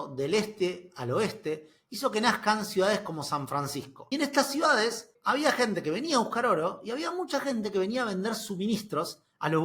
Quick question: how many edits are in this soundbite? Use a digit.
0